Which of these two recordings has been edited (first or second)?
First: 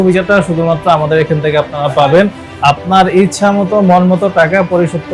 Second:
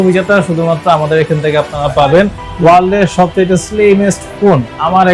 second